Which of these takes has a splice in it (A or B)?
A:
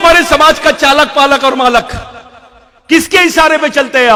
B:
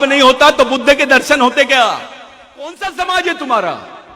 B